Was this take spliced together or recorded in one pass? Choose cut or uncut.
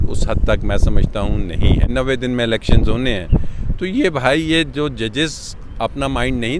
cut